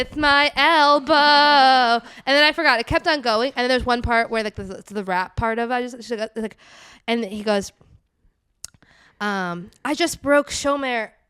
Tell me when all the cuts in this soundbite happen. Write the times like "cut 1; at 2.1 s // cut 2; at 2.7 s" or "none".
none

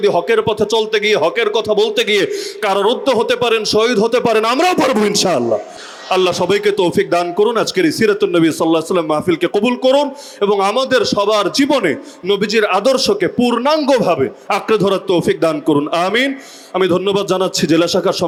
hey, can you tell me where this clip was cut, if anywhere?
none

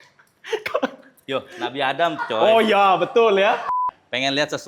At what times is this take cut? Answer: cut 1; at 3.7 s

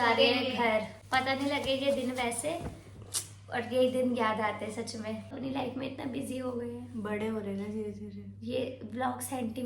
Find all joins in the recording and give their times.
cut 1; at 1.0 s // cut 2; at 5.4 s

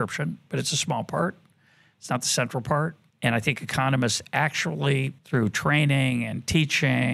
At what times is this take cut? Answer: cut 1; at 3.0 s // cut 2; at 5.2 s

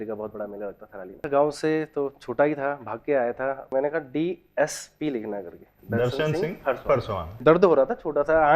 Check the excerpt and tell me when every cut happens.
cut 1; at 1.2 s // cut 2; at 3.7 s // cut 3; at 7.4 s

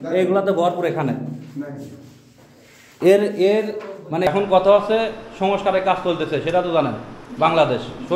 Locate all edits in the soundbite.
cut 1; at 4.3 s

